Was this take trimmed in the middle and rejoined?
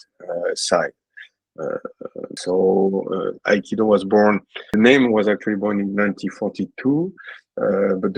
no; 0 cuts

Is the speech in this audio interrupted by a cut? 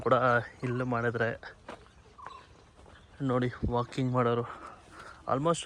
no; 0 cuts

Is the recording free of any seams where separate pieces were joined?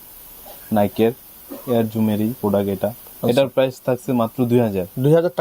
yes; 0 cuts

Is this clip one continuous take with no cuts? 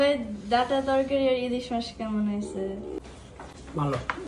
yes; 0 cuts

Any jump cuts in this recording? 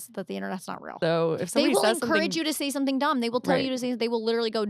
yes; 1 cut; at 0.9 s

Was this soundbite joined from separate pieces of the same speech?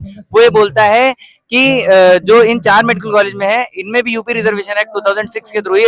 no; 0 cuts

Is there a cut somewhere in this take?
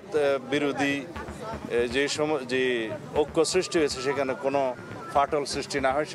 no; 0 cuts

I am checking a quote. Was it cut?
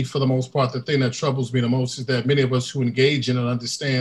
no; 0 cuts

